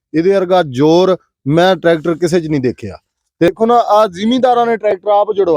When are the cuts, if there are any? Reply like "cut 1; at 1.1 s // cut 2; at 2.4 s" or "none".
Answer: cut 1; at 3.5 s